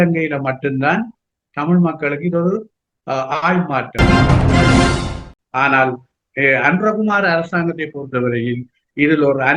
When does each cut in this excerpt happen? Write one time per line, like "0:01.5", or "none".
0:03.8
0:05.3